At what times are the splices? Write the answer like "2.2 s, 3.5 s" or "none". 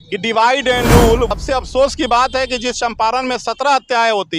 1.3 s